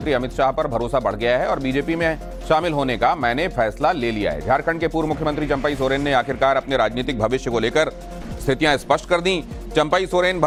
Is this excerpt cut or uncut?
uncut